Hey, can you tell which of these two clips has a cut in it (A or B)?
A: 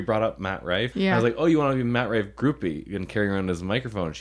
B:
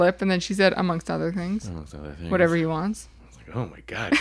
A